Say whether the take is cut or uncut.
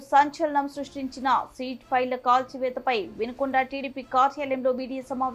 uncut